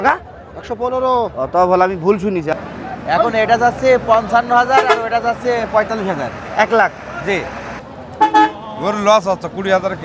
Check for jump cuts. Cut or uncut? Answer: cut